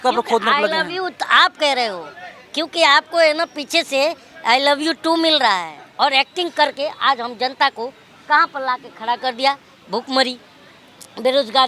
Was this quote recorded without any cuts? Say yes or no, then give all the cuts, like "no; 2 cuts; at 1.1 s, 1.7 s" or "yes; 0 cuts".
no; 1 cut; at 5.8 s